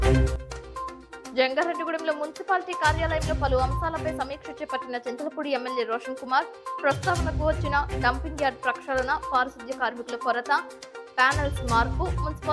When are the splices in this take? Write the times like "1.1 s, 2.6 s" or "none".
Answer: 1.0 s